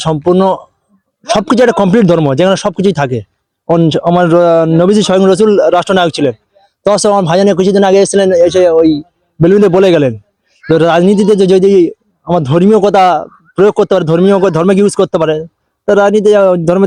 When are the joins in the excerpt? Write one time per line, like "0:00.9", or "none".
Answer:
none